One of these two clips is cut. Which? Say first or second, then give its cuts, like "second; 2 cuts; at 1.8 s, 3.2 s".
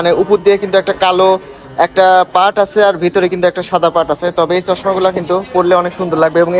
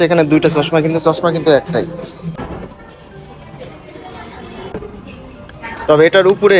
second; 2 cuts; at 2.3 s, 4.7 s